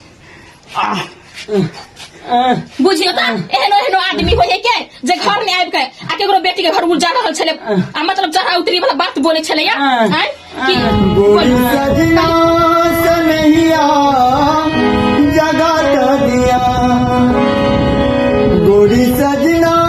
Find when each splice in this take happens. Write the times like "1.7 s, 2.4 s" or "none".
10.8 s

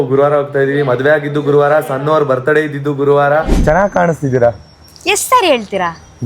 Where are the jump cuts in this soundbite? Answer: 3.5 s

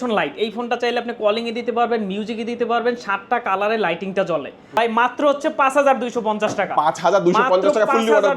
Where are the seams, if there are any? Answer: 4.8 s

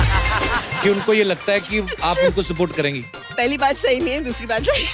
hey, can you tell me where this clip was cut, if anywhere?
3.2 s

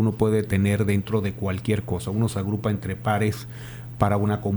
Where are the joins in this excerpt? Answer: none

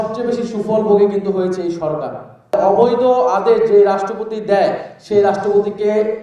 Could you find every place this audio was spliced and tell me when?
2.5 s

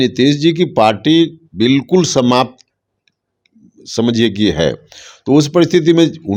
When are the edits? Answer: none

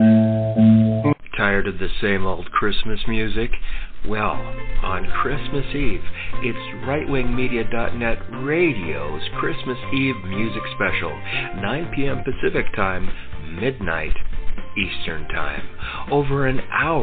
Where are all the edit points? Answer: 1.1 s

